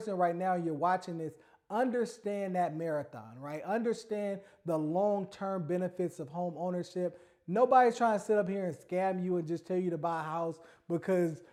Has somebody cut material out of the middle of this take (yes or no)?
no